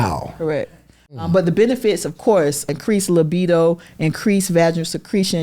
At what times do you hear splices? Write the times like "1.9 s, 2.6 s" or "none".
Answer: 1.2 s, 2.7 s